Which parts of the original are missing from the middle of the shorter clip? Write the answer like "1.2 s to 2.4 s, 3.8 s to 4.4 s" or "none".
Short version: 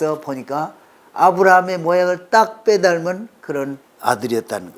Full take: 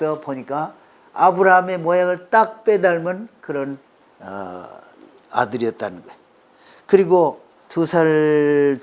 3.9 s to 5.2 s